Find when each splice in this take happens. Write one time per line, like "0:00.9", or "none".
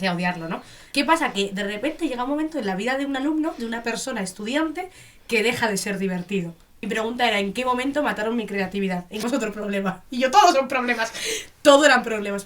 0:00.9
0:06.7
0:09.2

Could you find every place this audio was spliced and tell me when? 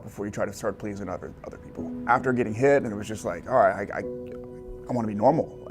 0:02.0
0:03.1

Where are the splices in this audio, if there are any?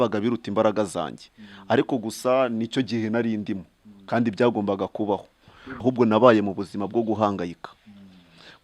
0:05.6

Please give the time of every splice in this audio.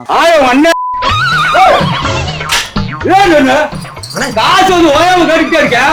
none

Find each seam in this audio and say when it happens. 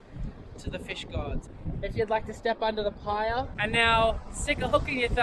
0:01.5
0:03.5

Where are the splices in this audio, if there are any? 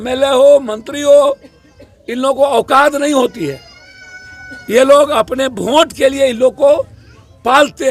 none

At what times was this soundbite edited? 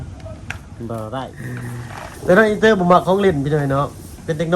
0:01.4

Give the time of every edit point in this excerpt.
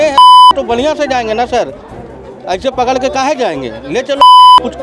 none

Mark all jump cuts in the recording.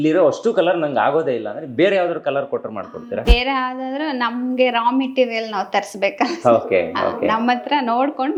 none

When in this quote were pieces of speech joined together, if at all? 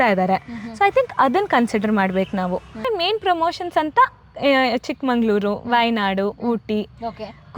0:02.8

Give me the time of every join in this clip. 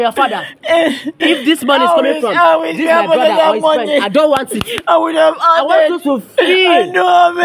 none

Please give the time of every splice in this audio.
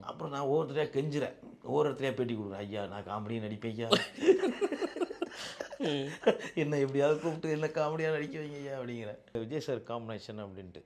0:09.3

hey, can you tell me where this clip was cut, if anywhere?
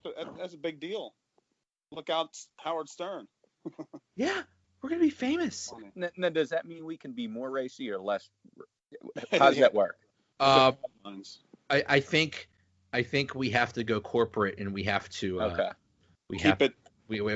none

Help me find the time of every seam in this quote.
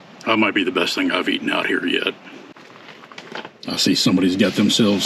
0:02.5

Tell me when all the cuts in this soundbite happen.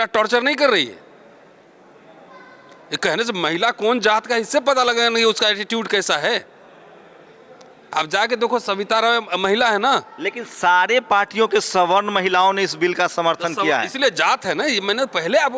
none

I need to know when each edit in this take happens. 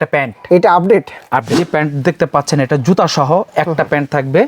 0:01.6

